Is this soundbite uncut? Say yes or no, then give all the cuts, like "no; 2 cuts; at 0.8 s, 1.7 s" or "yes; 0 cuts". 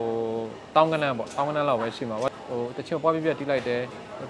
no; 1 cut; at 2.3 s